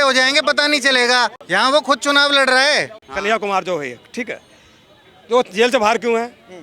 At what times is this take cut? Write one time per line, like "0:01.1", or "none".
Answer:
0:01.4
0:03.1